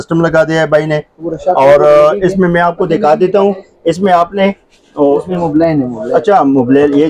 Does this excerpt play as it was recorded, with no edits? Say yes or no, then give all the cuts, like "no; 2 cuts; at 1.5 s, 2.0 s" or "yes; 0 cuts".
yes; 0 cuts